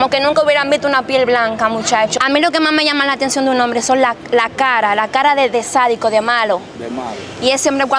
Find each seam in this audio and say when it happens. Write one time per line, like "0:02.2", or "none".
0:02.1

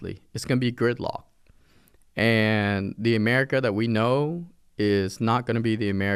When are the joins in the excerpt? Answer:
none

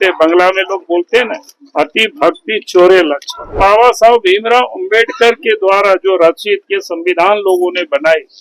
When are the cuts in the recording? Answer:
0:03.5

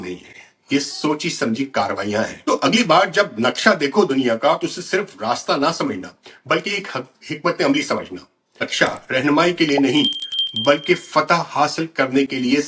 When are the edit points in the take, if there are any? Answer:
0:02.4
0:08.7

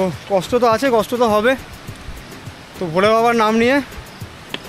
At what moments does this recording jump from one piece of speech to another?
none

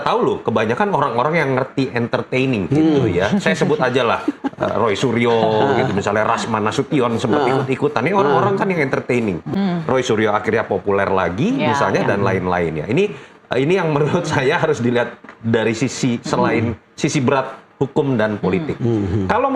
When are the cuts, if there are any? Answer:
none

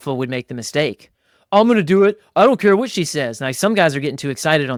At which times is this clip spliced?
none

